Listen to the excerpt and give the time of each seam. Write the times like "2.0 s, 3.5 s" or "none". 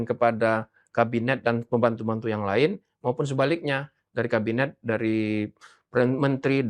none

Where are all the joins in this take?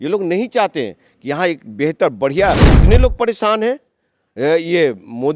2.7 s

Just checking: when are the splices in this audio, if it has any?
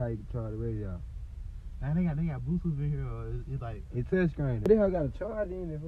4.7 s

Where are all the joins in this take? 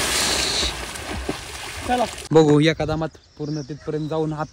2.2 s

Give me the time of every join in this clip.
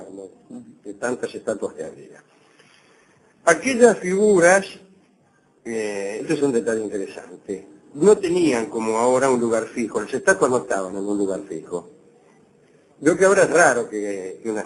4.4 s

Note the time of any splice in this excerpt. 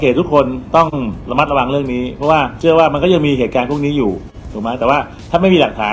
1.2 s, 2.5 s

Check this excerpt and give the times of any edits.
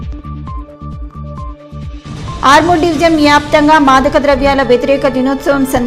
1.3 s

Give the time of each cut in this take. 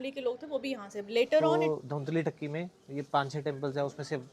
1.5 s

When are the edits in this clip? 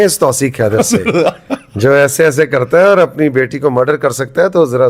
none

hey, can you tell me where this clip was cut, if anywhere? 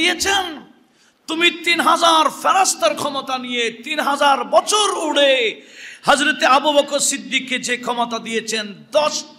none

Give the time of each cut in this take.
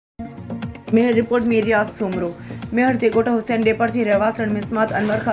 0.9 s

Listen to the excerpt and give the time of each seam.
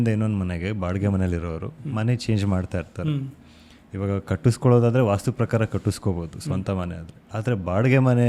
none

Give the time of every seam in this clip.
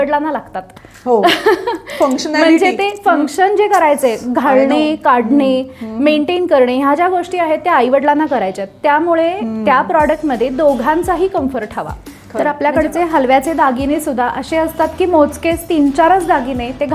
12.2 s

